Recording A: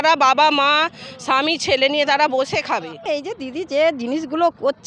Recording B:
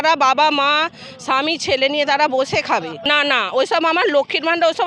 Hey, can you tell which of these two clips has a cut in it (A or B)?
A